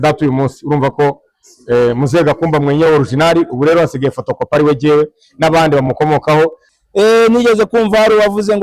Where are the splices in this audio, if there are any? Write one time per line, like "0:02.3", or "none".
0:06.7